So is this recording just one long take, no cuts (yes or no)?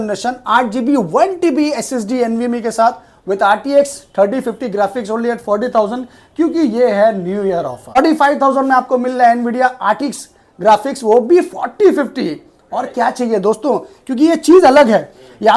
no